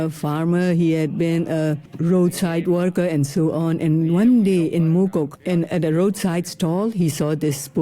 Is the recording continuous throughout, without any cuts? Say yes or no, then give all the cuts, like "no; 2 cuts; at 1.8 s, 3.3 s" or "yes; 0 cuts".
no; 2 cuts; at 1.9 s, 5.4 s